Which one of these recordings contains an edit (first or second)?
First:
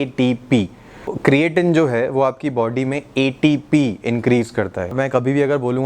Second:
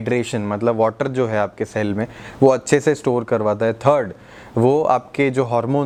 first